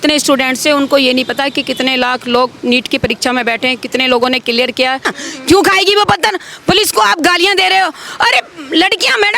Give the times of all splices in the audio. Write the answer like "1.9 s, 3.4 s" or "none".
5.1 s